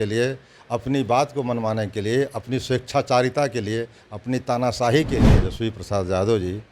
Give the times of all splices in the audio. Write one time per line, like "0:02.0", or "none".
0:05.4